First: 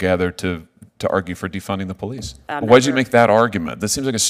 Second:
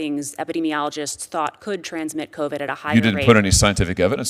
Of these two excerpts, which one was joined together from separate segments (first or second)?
first